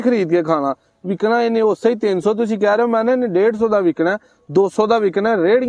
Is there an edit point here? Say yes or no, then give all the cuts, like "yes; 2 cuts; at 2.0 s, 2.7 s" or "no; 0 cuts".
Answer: no; 0 cuts